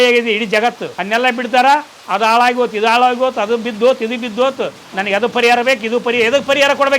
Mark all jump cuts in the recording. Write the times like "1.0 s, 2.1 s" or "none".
0.9 s